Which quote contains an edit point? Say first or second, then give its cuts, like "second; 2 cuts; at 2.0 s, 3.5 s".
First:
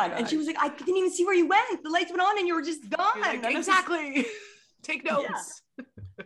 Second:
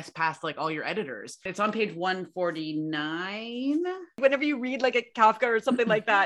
second; 2 cuts; at 1.5 s, 4.2 s